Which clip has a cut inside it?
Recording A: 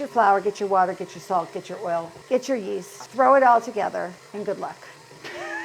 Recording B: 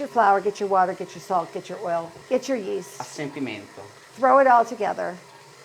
A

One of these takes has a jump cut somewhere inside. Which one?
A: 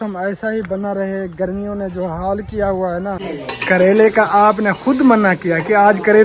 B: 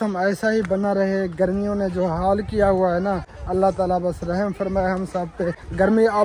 A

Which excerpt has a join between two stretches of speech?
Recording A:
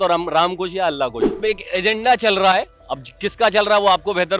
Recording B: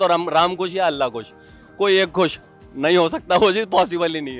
A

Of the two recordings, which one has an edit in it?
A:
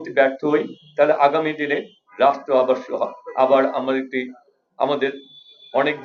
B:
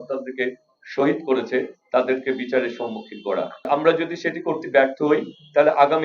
B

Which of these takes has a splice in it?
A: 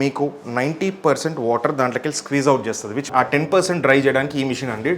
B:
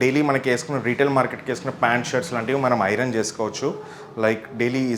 A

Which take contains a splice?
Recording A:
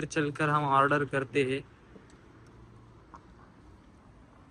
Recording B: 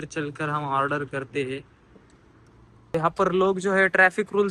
B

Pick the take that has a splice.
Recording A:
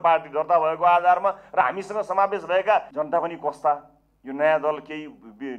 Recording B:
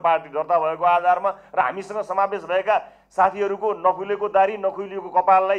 A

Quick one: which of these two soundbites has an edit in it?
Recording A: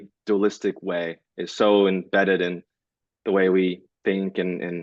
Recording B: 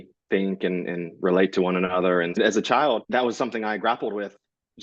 B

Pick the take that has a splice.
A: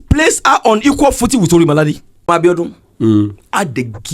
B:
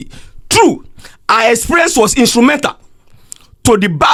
A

